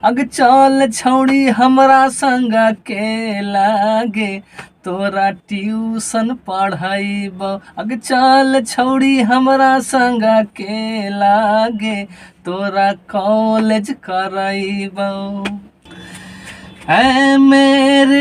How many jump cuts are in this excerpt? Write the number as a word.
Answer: one